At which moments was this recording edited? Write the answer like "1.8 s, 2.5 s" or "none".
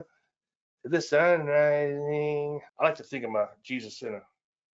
2.7 s